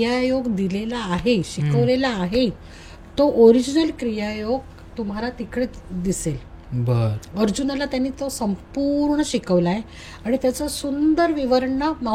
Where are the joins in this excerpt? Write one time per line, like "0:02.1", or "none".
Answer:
none